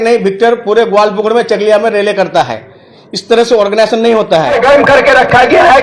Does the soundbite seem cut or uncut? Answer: cut